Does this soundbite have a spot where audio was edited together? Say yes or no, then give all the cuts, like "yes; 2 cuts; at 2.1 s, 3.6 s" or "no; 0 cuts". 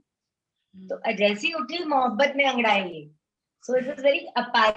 no; 0 cuts